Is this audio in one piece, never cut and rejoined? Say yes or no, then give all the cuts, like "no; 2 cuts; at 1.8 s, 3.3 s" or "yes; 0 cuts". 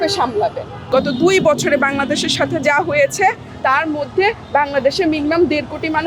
no; 1 cut; at 1.0 s